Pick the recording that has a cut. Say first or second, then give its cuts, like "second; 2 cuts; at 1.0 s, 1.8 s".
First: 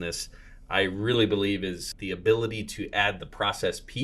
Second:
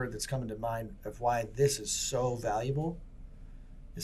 first; 1 cut; at 1.9 s